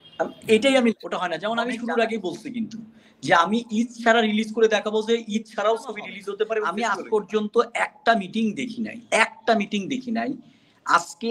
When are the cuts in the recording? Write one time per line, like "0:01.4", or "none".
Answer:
0:01.1
0:06.7